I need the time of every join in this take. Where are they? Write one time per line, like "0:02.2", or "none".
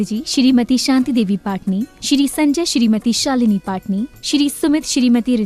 none